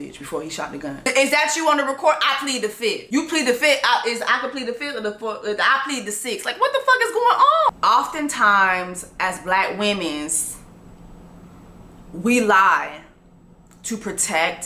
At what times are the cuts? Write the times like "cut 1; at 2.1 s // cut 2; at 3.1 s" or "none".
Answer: cut 1; at 1.0 s // cut 2; at 3.0 s // cut 3; at 7.7 s